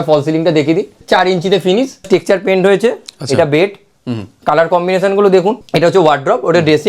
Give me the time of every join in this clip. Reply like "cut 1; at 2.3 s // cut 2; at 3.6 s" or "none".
cut 1; at 1.0 s // cut 2; at 2.1 s // cut 3; at 5.6 s

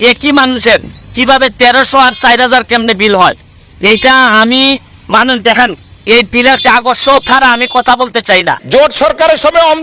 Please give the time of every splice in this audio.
cut 1; at 8.6 s

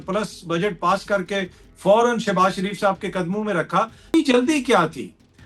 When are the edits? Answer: cut 1; at 4.1 s

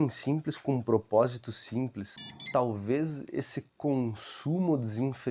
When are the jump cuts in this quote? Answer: cut 1; at 2.2 s

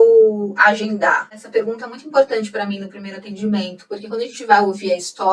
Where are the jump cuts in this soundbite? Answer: cut 1; at 1.4 s

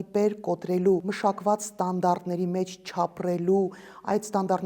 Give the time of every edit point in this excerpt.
cut 1; at 1.1 s

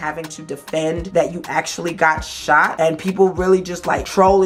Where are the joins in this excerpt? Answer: none

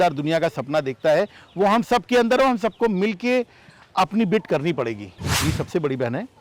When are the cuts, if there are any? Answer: cut 1; at 5.4 s

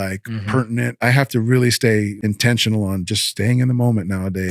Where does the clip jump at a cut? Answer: cut 1; at 1.0 s // cut 2; at 2.2 s

